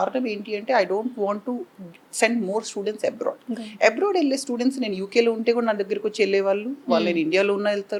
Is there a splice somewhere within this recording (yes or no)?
no